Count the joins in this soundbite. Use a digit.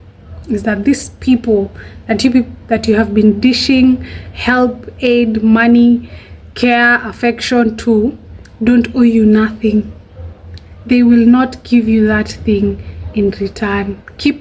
0